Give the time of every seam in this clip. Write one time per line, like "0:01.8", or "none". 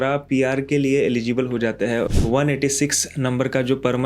0:02.1